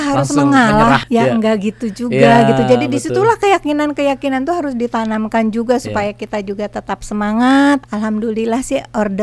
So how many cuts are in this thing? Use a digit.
2